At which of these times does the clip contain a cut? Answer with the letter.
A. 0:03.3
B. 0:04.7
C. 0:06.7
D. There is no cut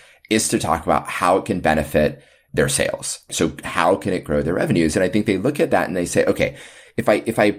A